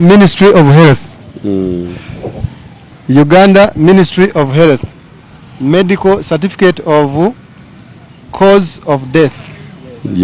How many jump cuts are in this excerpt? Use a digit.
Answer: 0